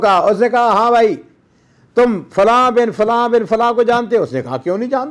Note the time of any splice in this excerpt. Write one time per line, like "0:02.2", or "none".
none